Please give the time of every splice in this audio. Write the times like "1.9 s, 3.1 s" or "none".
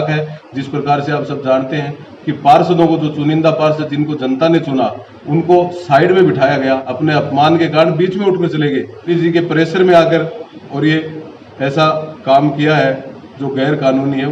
6.9 s, 9.0 s